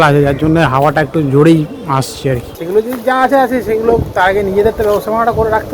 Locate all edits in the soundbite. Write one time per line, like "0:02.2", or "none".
0:02.5